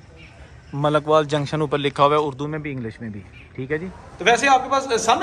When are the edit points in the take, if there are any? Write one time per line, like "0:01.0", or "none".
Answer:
0:04.0

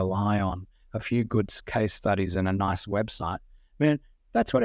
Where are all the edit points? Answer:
none

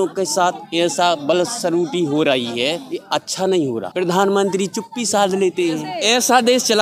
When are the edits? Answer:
0:02.9
0:03.9
0:05.9

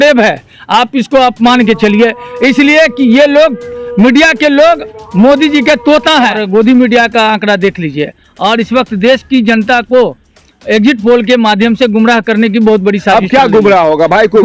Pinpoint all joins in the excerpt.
0:06.4

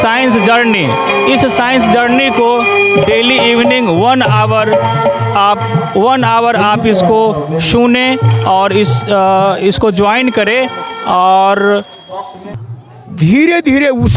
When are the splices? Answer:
0:12.5

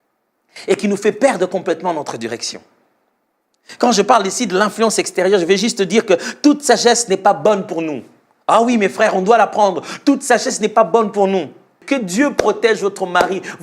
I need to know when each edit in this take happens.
0:11.8

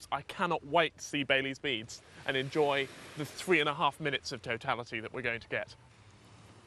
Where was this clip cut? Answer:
0:05.8

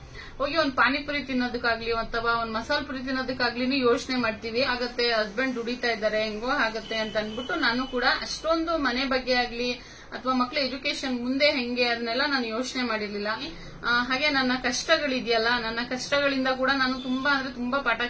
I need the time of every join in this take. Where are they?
0:04.7
0:13.5

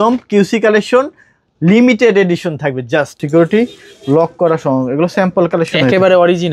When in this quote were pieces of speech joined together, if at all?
0:03.2

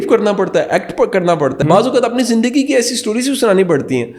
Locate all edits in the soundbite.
0:01.6

